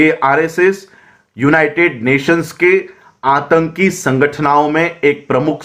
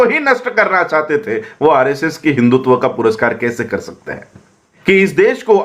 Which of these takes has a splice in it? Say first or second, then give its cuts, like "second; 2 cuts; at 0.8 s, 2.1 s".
second; 1 cut; at 4.7 s